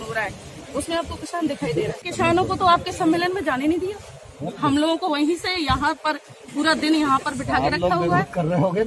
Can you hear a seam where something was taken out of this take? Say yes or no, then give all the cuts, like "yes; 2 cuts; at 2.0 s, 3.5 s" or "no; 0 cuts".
yes; 1 cut; at 2.1 s